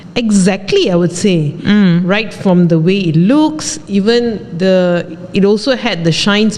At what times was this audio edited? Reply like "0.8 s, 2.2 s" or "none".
none